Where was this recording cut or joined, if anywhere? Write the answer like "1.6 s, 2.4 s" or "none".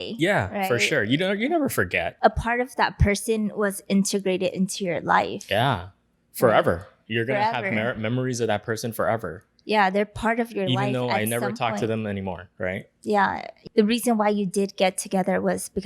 2.1 s, 13.5 s